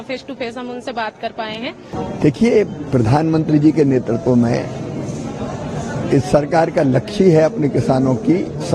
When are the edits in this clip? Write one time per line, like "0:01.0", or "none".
0:01.9